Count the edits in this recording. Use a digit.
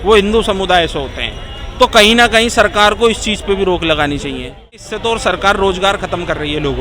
1